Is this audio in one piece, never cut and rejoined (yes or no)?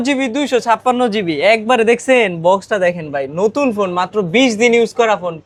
yes